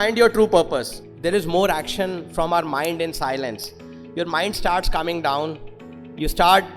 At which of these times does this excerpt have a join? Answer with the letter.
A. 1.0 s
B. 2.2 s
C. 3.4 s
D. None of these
A